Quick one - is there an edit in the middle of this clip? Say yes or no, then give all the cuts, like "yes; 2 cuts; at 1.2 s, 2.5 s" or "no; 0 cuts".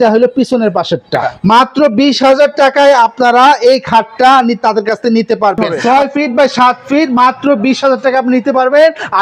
yes; 2 cuts; at 1.3 s, 5.6 s